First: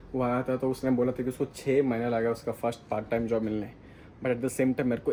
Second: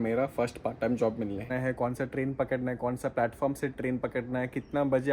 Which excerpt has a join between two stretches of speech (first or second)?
second